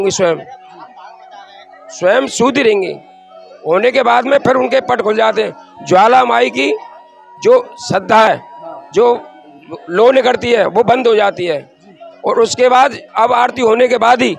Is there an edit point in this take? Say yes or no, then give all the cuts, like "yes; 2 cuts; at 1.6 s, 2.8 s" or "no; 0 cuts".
no; 0 cuts